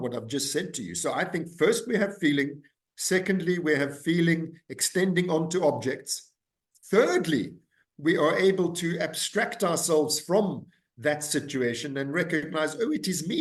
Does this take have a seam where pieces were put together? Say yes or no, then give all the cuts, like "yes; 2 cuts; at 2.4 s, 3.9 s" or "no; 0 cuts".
no; 0 cuts